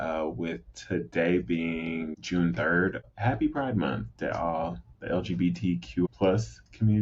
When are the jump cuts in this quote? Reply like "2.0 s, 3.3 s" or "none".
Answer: none